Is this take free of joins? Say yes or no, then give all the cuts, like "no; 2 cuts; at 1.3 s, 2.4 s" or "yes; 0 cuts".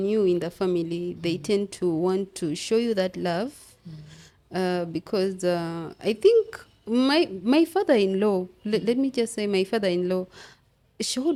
yes; 0 cuts